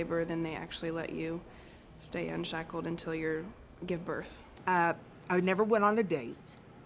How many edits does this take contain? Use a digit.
1